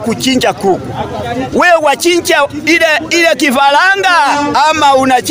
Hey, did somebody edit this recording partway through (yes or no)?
no